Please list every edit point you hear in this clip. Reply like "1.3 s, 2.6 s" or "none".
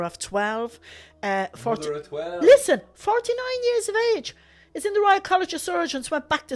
none